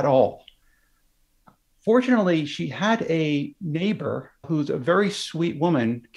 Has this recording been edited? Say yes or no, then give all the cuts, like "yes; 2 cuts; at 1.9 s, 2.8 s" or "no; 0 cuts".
yes; 1 cut; at 4.4 s